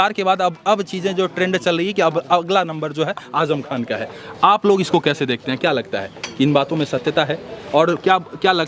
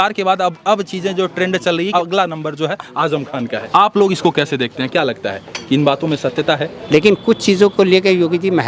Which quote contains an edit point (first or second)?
second